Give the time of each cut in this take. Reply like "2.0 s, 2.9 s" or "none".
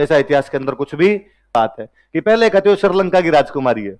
1.5 s